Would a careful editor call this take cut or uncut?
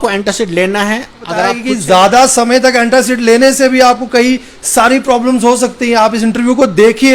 cut